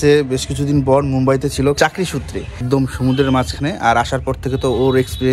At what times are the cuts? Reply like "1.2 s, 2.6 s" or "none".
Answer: 2.5 s